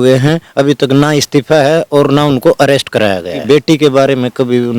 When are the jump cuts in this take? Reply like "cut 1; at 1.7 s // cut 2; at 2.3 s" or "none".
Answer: cut 1; at 3.3 s